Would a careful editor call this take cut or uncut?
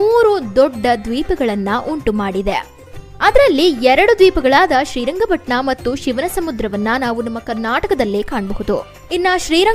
uncut